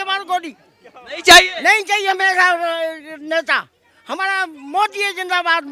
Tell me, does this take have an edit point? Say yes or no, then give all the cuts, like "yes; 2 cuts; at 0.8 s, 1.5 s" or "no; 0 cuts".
no; 0 cuts